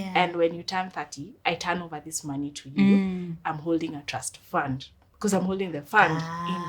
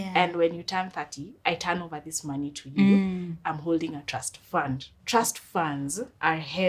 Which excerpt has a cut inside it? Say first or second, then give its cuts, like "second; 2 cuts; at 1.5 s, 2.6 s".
second; 1 cut; at 4.9 s